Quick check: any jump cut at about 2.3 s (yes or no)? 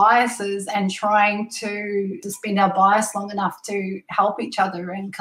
yes